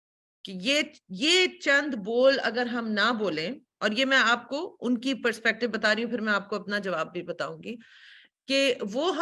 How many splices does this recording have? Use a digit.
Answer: 0